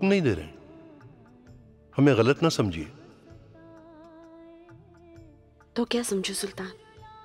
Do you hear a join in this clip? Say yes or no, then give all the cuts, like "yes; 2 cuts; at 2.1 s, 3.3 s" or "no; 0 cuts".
no; 0 cuts